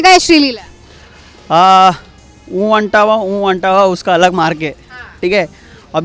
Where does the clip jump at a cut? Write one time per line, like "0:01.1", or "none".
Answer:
none